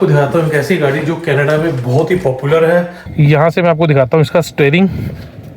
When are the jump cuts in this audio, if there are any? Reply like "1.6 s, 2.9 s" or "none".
3.0 s